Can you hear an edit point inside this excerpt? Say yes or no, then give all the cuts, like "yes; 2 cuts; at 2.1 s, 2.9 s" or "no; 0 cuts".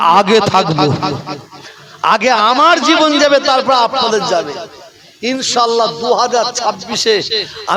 no; 0 cuts